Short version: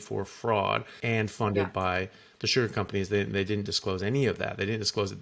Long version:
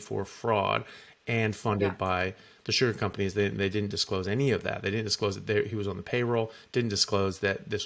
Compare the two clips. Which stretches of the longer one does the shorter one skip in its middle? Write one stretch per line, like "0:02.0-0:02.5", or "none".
0:00.9-0:01.2